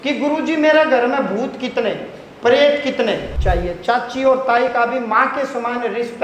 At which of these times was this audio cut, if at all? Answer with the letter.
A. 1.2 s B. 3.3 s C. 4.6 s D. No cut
B